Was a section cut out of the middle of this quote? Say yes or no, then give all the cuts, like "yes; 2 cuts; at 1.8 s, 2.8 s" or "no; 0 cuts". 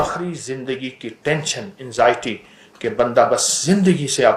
no; 0 cuts